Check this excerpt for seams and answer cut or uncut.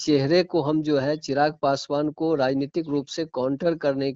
uncut